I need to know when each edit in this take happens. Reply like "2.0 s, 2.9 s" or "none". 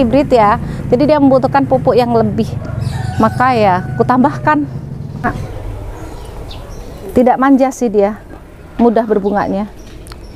5.2 s